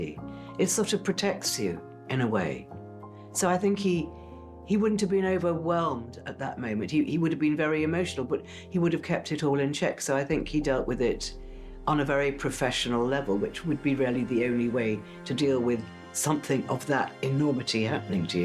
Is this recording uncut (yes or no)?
yes